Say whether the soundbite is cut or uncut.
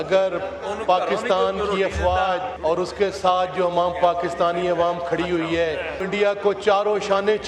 cut